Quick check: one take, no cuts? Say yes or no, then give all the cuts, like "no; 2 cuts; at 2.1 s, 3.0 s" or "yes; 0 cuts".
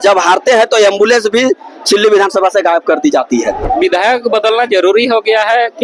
no; 1 cut; at 3.6 s